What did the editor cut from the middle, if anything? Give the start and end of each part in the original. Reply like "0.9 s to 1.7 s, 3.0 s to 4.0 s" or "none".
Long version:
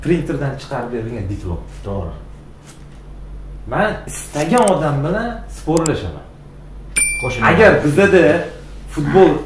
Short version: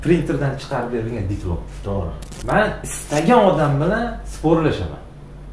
2.3 s to 3.5 s